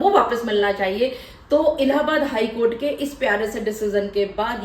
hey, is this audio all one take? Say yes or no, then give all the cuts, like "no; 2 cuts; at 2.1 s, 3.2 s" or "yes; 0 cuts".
yes; 0 cuts